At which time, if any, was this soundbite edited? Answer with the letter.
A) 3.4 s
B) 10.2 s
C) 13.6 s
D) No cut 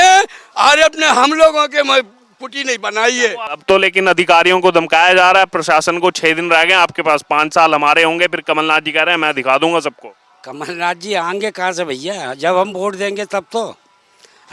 A